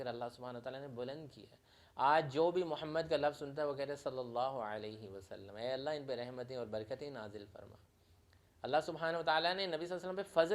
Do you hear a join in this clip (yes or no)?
no